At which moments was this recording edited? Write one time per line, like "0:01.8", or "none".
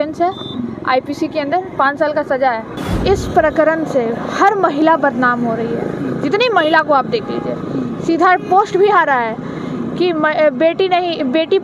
0:02.8

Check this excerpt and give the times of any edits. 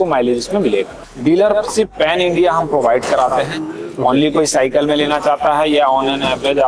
0:01.0

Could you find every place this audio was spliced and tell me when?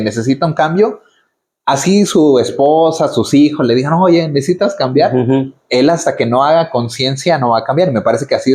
none

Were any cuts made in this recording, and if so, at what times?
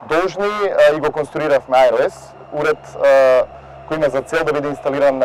none

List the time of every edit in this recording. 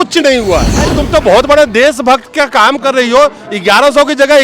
0:01.0

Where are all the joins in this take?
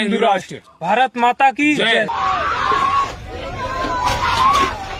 none

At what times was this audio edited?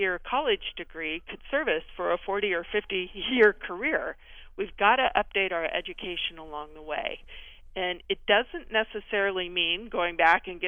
none

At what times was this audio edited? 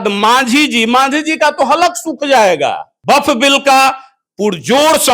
0:02.9

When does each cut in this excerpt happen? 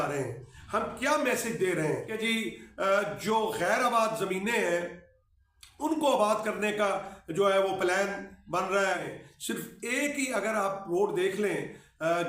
0:02.1
0:09.2

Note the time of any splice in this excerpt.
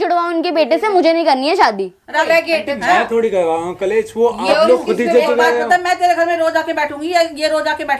0:02.2

